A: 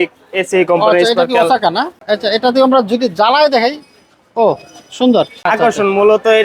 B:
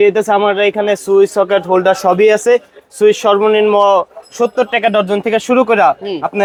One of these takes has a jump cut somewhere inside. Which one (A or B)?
A